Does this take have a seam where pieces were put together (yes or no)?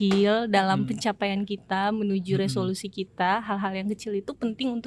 no